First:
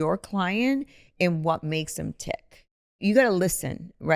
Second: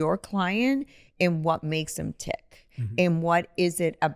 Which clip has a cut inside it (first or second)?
first